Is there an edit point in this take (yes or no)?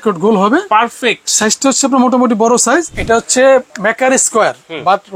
yes